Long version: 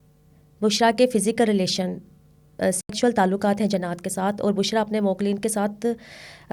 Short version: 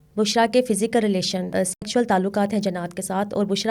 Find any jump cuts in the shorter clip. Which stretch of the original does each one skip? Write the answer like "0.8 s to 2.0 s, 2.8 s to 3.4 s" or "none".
1.9 s to 2.5 s